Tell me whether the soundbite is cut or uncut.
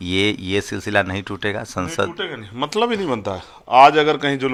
uncut